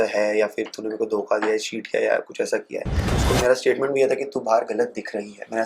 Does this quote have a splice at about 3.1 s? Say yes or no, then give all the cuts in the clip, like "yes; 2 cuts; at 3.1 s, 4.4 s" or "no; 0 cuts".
yes; 1 cut; at 3.1 s